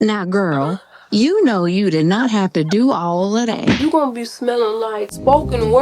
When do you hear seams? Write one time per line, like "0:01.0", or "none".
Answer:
0:03.8